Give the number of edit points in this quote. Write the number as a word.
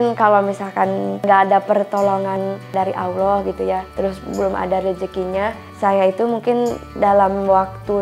one